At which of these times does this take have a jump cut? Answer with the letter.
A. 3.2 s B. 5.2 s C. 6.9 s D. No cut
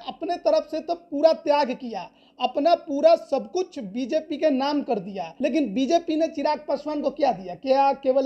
B